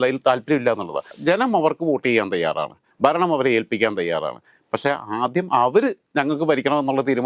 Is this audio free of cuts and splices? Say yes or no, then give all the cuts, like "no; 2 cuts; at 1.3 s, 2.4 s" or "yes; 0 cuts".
no; 1 cut; at 1.1 s